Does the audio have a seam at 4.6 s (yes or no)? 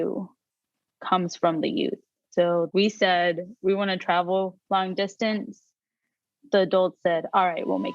yes